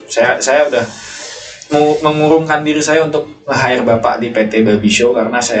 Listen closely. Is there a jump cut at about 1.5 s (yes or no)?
no